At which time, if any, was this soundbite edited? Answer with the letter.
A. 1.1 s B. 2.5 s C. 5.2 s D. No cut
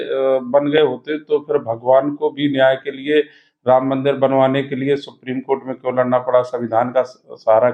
D